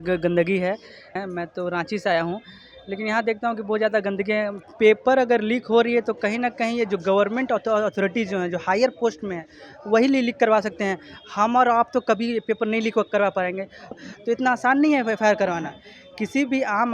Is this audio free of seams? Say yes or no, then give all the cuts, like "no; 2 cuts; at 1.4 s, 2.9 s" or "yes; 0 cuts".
no; 3 cuts; at 1.2 s, 4.6 s, 14.0 s